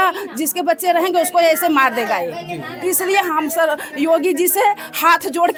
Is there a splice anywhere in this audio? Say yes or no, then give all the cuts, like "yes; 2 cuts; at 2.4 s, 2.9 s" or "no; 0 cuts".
no; 0 cuts